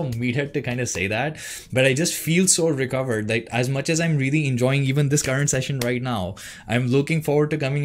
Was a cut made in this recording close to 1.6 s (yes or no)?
no